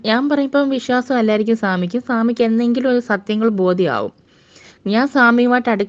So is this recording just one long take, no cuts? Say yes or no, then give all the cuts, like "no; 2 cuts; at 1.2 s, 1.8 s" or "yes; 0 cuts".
yes; 0 cuts